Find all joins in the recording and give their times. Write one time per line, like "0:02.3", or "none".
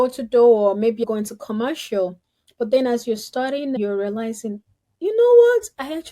0:01.0
0:03.8